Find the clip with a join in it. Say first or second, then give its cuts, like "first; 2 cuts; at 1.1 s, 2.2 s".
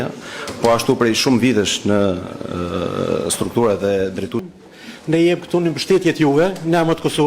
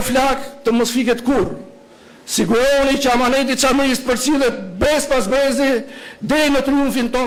first; 1 cut; at 4.4 s